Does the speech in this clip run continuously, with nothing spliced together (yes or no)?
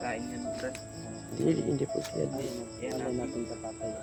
yes